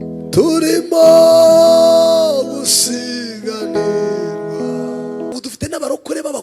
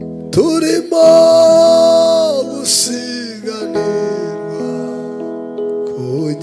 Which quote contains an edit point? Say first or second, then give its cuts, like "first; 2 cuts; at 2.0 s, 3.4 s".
first; 1 cut; at 5.3 s